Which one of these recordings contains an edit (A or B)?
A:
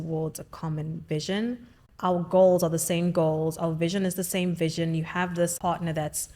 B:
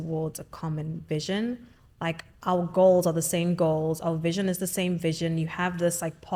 A